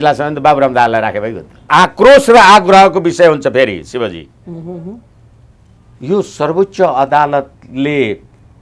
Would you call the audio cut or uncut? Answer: cut